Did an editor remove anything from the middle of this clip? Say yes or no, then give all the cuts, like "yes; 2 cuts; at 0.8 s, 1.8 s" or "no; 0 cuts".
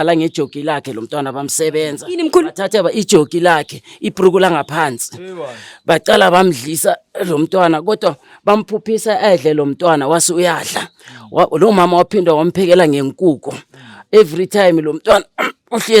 no; 0 cuts